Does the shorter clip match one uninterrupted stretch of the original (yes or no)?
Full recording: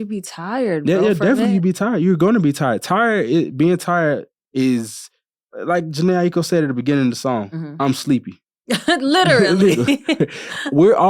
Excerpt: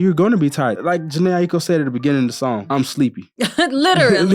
no